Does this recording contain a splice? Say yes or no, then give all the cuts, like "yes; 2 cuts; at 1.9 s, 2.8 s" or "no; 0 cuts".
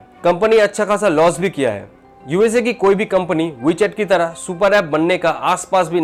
no; 0 cuts